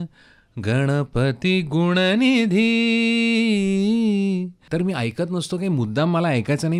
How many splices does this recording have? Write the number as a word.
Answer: one